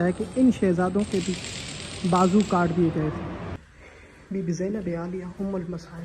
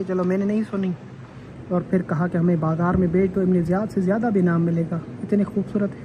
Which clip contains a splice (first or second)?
first